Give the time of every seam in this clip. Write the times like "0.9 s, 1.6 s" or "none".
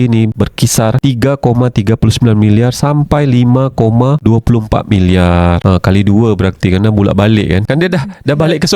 none